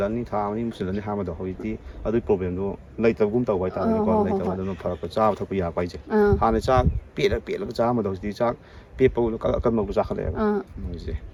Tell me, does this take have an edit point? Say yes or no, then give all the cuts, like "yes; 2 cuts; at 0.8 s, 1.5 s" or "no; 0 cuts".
no; 0 cuts